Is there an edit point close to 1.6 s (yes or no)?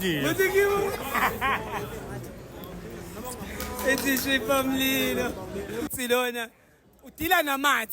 no